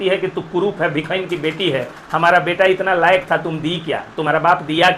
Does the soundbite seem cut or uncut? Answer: uncut